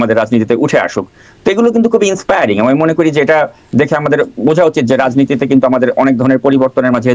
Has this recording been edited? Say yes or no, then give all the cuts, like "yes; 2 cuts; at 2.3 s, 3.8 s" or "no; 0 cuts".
no; 0 cuts